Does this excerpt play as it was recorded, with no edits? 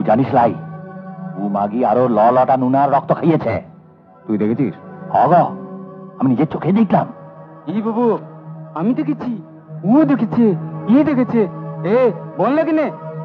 yes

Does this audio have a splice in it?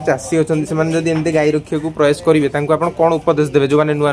no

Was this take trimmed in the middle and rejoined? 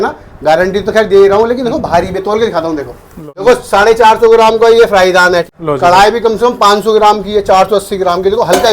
yes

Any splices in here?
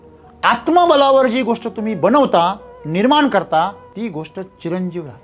yes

